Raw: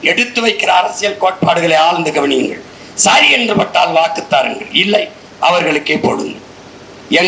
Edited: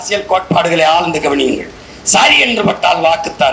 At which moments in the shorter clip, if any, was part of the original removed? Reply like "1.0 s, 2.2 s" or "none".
none